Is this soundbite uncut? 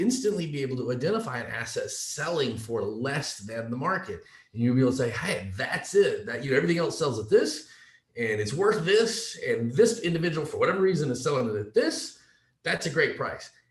yes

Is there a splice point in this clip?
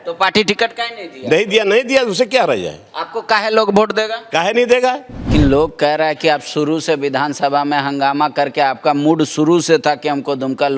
yes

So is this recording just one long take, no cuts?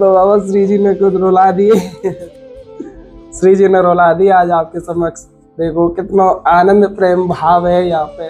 yes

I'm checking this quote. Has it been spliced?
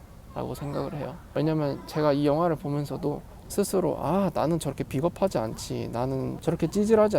yes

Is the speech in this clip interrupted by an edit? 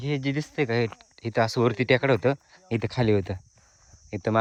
no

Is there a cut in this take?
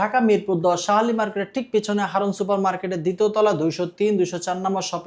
no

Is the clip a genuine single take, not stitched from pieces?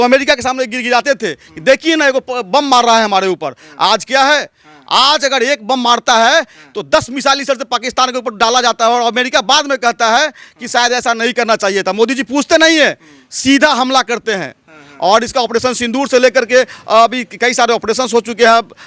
yes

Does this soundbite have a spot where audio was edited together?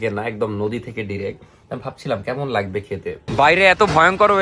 yes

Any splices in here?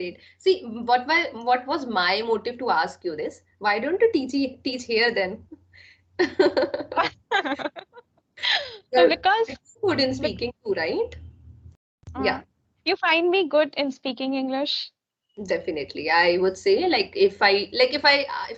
no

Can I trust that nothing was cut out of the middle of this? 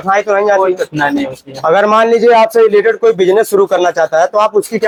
yes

